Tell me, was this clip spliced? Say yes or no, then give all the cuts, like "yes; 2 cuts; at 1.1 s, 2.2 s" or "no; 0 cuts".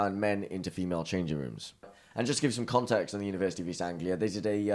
yes; 1 cut; at 1.9 s